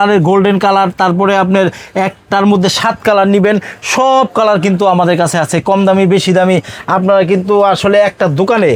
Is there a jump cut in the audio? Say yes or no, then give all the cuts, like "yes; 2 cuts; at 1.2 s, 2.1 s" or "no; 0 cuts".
no; 0 cuts